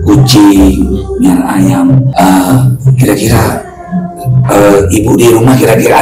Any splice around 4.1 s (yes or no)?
no